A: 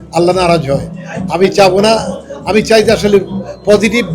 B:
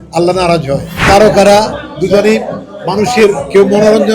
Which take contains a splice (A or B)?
B